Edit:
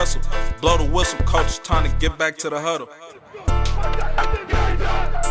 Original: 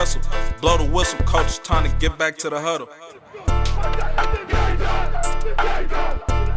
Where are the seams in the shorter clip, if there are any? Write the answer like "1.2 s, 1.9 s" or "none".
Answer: none